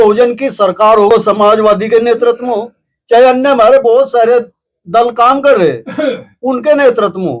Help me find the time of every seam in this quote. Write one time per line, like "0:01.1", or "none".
0:01.1